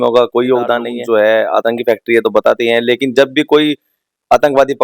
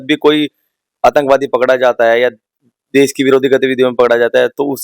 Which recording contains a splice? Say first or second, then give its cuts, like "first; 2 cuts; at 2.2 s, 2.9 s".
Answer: first; 1 cut; at 0.9 s